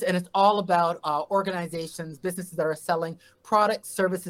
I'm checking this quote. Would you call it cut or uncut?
uncut